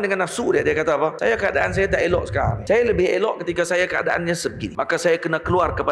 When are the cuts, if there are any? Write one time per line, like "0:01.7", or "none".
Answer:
0:01.2
0:02.6
0:04.6